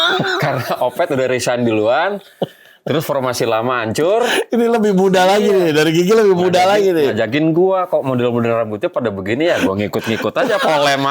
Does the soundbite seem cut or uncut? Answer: uncut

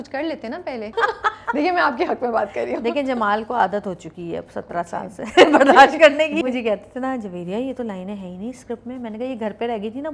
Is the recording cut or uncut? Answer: cut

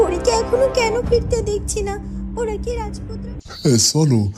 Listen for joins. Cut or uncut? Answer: cut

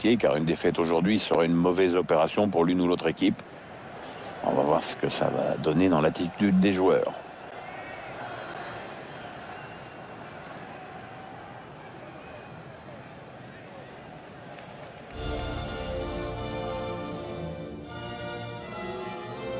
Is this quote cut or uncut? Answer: uncut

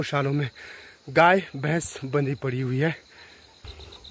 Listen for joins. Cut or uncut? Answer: uncut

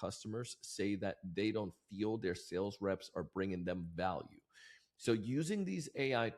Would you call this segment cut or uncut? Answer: uncut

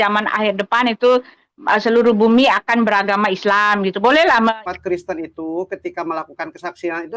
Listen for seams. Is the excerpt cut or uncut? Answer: cut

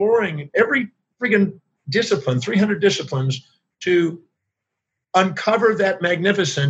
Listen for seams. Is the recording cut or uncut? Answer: uncut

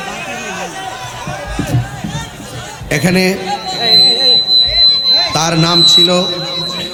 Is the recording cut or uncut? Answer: uncut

